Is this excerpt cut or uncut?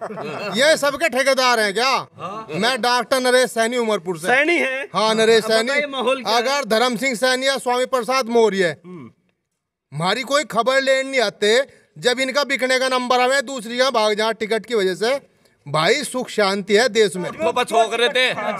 cut